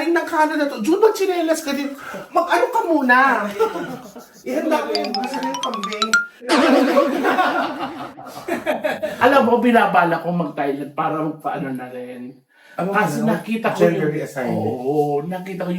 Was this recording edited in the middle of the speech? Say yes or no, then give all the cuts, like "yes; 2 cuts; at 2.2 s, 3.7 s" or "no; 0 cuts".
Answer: yes; 1 cut; at 9.2 s